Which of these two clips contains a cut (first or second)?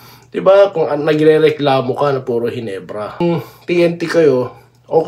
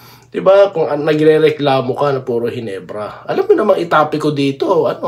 first